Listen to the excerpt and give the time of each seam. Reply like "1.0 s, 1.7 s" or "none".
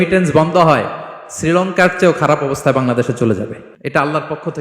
3.7 s